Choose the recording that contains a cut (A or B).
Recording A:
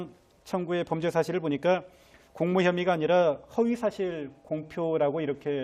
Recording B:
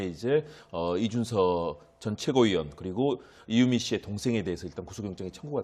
B